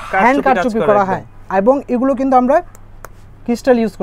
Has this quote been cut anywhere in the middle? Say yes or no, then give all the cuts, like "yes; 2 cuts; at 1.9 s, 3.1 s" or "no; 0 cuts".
no; 0 cuts